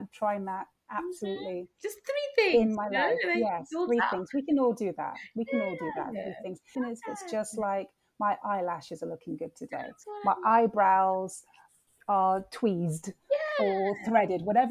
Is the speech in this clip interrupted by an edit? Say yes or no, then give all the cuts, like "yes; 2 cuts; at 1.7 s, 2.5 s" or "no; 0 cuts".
no; 0 cuts